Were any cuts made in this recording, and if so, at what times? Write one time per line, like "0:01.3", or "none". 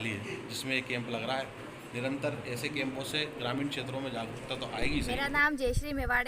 0:05.1